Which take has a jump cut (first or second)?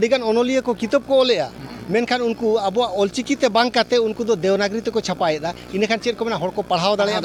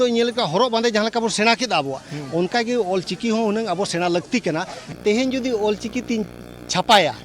second